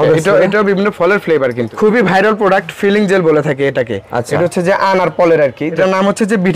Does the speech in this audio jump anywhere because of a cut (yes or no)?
yes